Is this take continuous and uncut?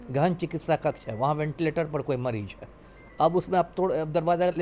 yes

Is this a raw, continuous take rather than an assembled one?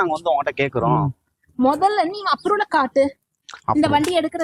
yes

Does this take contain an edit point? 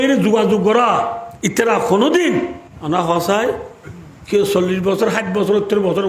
yes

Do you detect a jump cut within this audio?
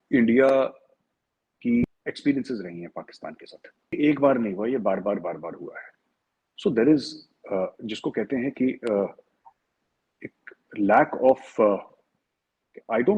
yes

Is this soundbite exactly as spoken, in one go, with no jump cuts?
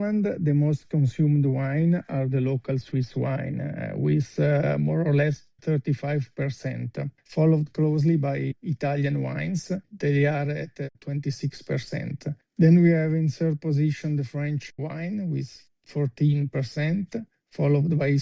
no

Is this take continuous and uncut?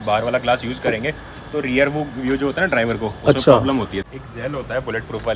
no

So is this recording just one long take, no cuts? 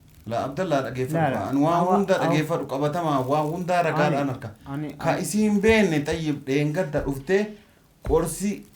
yes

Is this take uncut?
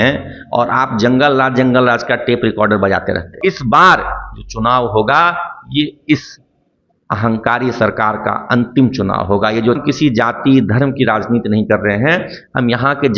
no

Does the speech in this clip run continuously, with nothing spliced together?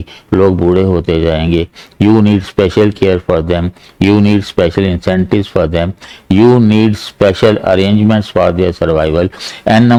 yes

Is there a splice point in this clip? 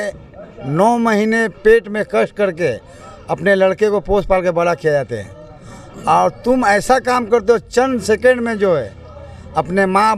no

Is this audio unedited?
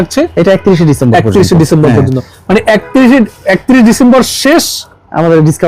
yes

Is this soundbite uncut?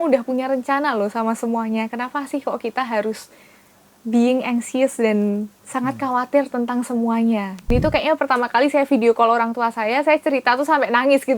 no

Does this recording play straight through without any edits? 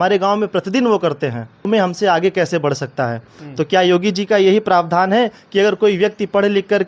no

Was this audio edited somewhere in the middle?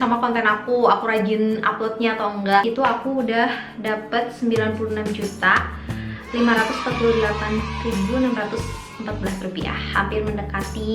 yes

